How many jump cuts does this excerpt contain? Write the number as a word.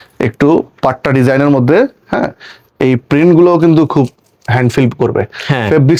zero